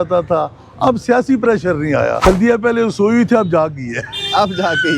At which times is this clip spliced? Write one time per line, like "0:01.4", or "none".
0:02.2